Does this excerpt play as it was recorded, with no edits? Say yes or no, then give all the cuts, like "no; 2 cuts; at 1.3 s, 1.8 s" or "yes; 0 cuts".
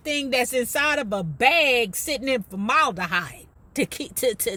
yes; 0 cuts